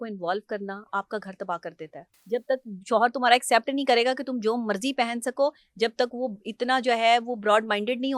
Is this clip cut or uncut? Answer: cut